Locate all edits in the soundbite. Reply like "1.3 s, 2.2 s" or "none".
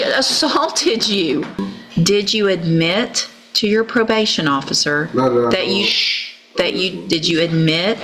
1.6 s